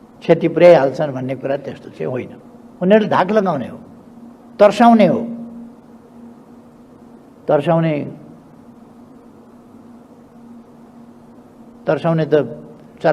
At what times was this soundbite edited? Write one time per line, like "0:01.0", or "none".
none